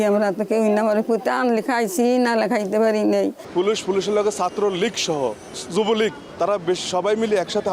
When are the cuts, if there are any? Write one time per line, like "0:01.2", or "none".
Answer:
0:03.4
0:05.5
0:06.2